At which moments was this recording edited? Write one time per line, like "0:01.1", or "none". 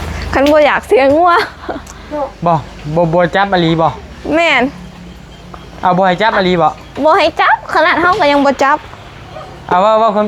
none